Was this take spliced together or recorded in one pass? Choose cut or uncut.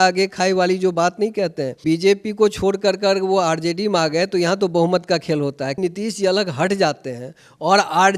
cut